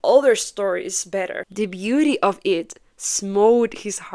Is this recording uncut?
no; 1 cut; at 1.4 s

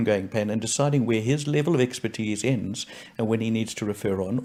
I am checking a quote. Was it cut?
no; 0 cuts

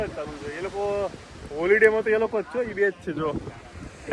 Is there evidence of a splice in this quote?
no; 0 cuts

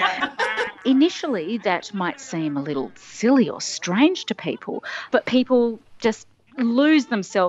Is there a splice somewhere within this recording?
no; 0 cuts

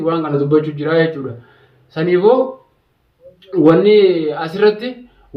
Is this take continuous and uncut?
yes; 0 cuts

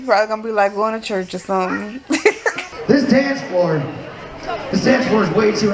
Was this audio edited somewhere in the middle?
yes; 1 cut; at 2.5 s

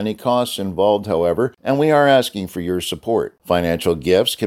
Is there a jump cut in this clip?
yes; 1 cut; at 1.6 s

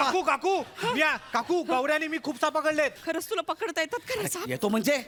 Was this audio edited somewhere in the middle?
no; 0 cuts

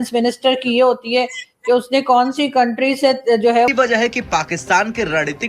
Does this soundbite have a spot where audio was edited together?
yes; 1 cut; at 3.7 s

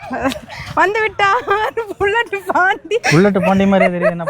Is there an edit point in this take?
yes; 1 cut; at 3.0 s

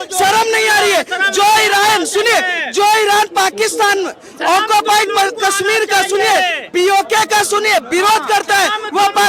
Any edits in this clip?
no; 0 cuts

